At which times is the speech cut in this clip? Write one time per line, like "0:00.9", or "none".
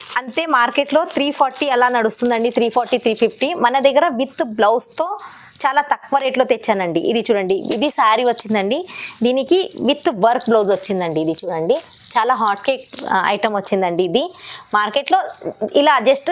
none

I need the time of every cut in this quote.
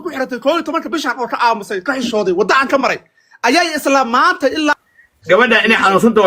0:04.8

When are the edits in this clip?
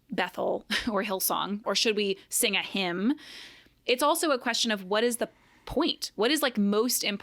0:01.6

